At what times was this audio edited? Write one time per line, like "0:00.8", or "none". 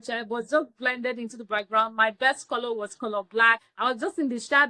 0:03.7